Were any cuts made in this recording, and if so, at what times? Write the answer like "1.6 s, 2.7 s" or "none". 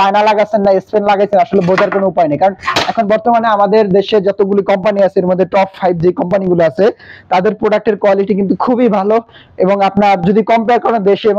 none